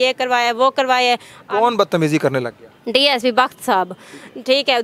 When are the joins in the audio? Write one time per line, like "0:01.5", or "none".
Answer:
none